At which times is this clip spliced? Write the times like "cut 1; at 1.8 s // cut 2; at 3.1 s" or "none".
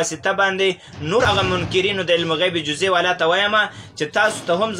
cut 1; at 1.2 s